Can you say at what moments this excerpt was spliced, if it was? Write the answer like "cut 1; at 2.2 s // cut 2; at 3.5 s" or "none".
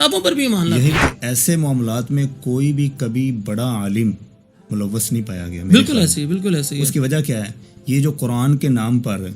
cut 1; at 0.9 s